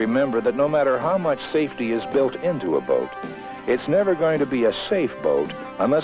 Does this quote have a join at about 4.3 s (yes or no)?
yes